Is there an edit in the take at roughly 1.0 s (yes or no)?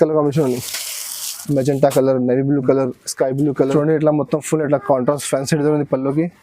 no